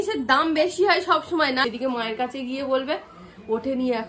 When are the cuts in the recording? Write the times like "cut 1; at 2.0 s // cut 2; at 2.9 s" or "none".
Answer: cut 1; at 1.7 s